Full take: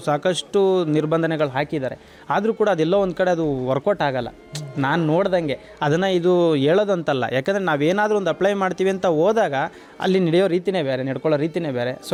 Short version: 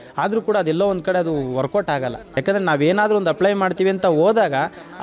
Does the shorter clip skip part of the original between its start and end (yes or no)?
yes